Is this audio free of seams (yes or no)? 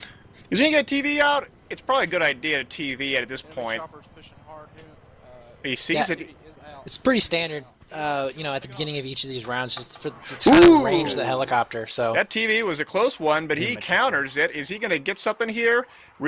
no